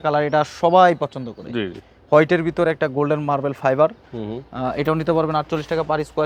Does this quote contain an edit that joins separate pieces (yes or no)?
no